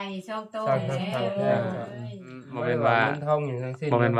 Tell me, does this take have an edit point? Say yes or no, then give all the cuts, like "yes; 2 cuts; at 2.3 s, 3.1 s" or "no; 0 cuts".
yes; 1 cut; at 2.5 s